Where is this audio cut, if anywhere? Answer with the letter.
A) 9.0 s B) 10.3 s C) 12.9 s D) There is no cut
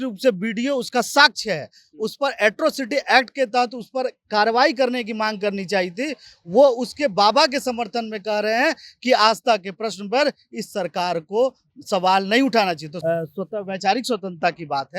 C